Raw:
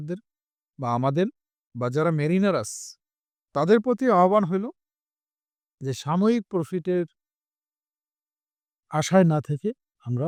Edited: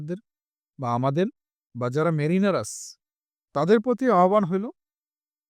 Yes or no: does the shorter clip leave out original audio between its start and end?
no